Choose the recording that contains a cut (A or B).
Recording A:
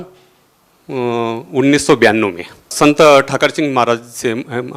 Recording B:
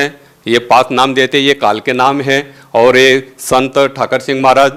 A